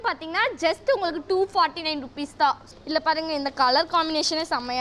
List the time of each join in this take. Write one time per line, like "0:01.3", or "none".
0:02.6

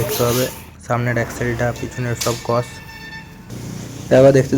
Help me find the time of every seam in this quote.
0:03.5

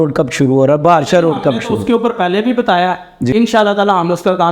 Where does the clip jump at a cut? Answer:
0:03.3

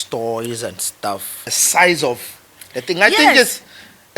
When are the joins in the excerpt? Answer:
0:01.6

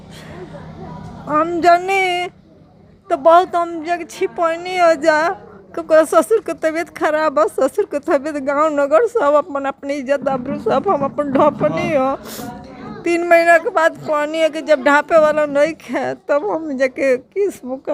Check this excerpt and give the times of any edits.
none

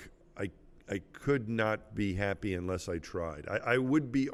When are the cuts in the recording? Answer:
none

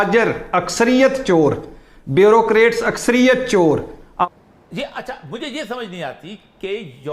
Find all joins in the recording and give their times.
0:04.4

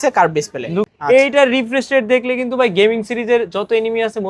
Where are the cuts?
0:00.9

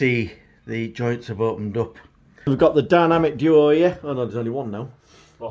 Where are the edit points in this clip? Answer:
0:02.5

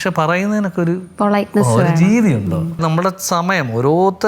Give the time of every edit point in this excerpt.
0:01.1
0:02.8

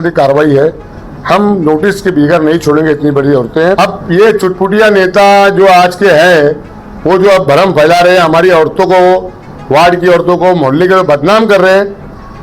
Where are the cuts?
0:03.8

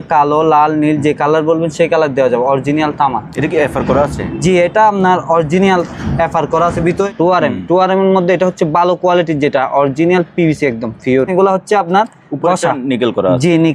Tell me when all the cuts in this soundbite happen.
0:07.1
0:11.3

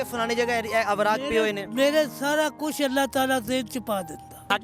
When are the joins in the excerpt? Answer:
none

